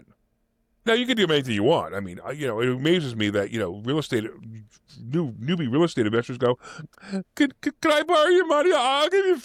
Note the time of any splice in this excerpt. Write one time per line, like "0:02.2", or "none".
none